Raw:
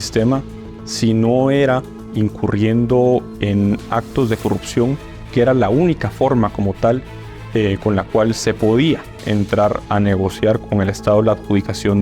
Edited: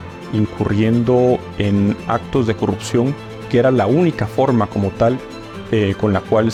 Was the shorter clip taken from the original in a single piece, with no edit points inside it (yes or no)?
yes